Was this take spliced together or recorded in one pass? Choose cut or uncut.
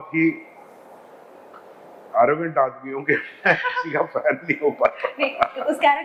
uncut